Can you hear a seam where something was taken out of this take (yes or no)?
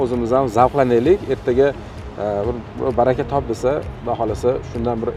no